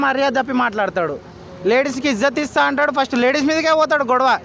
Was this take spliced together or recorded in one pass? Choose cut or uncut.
uncut